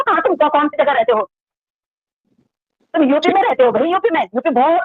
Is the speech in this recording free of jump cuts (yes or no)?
yes